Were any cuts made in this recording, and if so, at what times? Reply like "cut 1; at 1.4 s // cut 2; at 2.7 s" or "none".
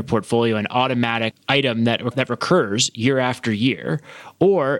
cut 1; at 1.4 s // cut 2; at 2.1 s